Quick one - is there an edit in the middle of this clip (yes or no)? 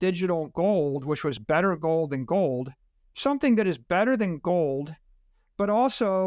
no